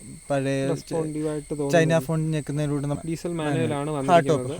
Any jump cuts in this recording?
yes; 1 cut; at 3.0 s

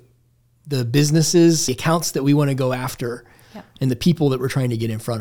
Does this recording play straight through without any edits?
no; 1 cut; at 1.7 s

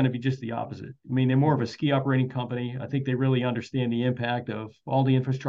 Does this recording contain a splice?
no; 0 cuts

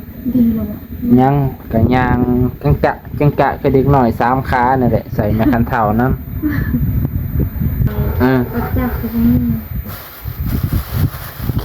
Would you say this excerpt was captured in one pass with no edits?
no; 1 cut; at 7.9 s

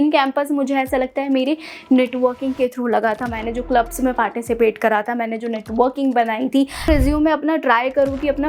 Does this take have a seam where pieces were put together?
yes; 1 cut; at 6.9 s

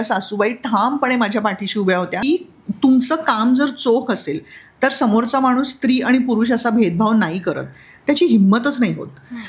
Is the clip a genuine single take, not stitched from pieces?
no; 1 cut; at 2.2 s

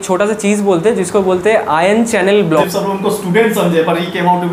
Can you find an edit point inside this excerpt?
yes; 1 cut; at 2.6 s

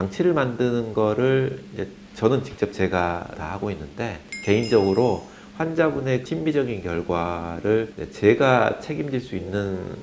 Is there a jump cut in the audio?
yes; 2 cuts; at 6.2 s, 8.0 s

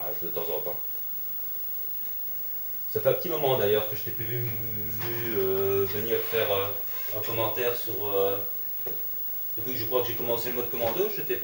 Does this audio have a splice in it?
no; 0 cuts

